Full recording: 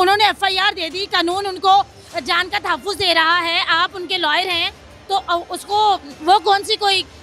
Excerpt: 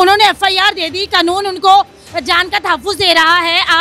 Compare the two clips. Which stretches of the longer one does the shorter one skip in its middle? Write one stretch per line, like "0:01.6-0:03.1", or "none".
none